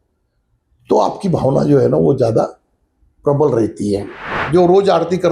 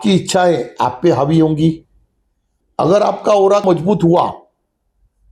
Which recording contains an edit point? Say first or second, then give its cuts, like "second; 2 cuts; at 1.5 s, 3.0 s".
first; 1 cut; at 4.4 s